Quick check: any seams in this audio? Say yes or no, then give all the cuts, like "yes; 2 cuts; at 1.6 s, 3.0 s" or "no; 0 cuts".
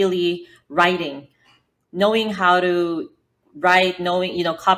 no; 0 cuts